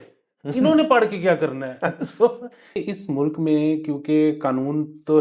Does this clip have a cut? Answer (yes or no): yes